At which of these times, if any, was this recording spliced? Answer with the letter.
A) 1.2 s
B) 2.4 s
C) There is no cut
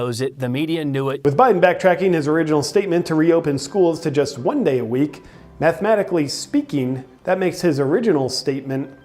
A